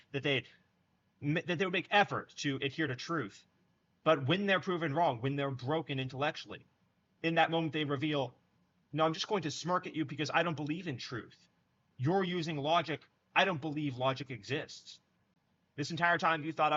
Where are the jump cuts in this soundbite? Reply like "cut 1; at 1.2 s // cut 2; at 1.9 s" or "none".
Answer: none